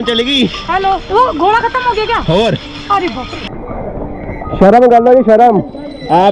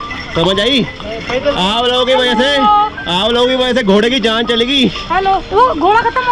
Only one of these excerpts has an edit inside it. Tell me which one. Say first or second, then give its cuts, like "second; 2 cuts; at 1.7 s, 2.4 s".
first; 1 cut; at 3.6 s